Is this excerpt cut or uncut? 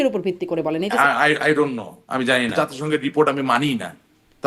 cut